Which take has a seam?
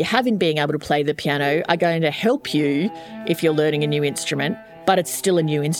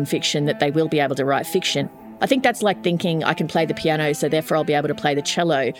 second; 1 cut; at 2.0 s

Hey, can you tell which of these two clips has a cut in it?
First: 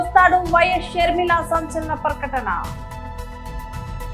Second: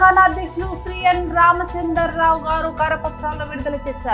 first; 1 cut; at 2.9 s

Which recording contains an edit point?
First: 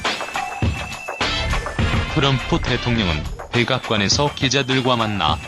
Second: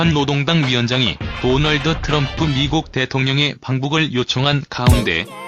first; 1 cut; at 1.6 s

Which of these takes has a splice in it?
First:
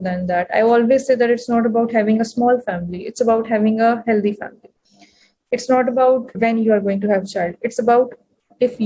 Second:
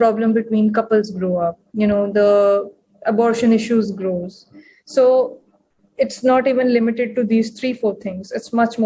first; 1 cut; at 6.4 s

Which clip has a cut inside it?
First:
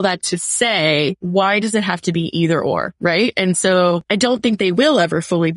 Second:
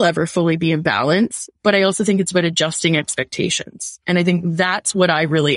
first; 3 cuts; at 1.2 s, 2.9 s, 4.0 s

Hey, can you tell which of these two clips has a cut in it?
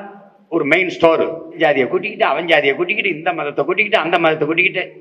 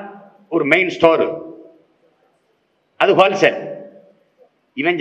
first; 1 cut; at 1.6 s

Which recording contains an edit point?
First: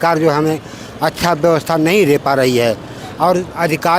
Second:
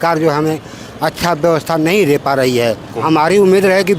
second; 1 cut; at 2.9 s

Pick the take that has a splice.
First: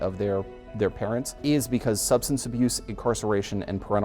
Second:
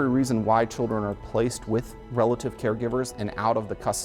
first; 1 cut; at 1.3 s

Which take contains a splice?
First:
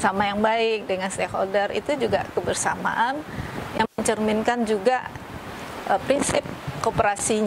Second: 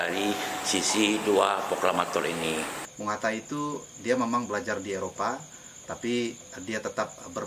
second; 1 cut; at 2.8 s

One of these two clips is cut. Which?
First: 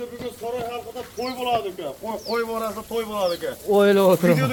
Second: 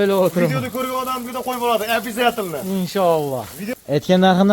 second; 1 cut; at 3.6 s

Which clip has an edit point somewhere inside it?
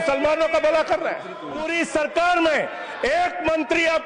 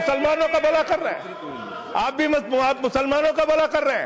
first; 1 cut; at 1.7 s

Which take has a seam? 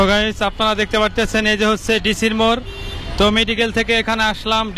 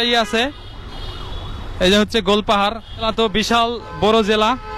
second; 1 cut; at 3.1 s

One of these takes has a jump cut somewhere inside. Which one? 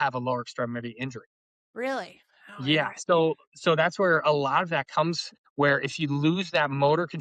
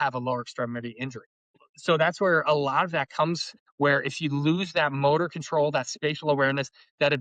second; 1 cut; at 1.7 s

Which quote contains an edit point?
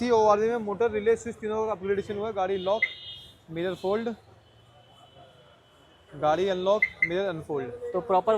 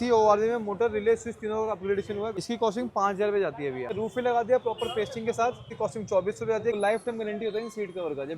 second; 4 cuts; at 2.4 s, 4.0 s, 5.7 s, 6.8 s

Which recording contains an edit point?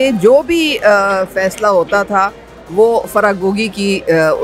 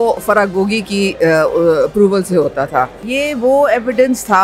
second; 1 cut; at 3.1 s

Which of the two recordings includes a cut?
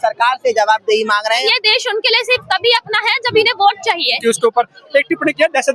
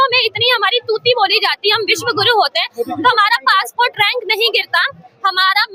first; 2 cuts; at 1.4 s, 4.2 s

